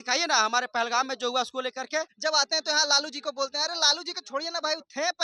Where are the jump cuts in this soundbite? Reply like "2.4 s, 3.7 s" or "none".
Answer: 2.1 s